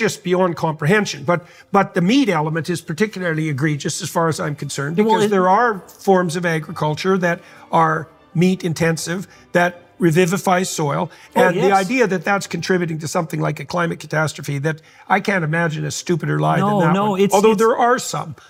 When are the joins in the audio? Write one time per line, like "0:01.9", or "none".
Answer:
none